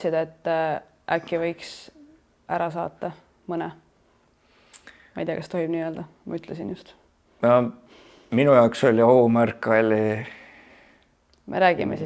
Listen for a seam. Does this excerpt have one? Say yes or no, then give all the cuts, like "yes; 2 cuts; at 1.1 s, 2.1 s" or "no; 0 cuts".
no; 0 cuts